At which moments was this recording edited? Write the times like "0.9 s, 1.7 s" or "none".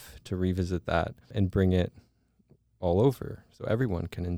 1.3 s